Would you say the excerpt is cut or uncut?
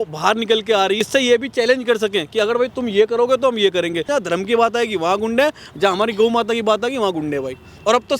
cut